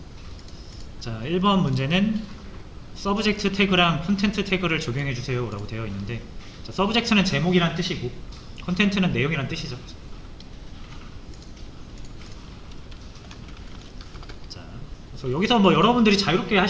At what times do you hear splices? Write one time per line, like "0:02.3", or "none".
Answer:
0:15.3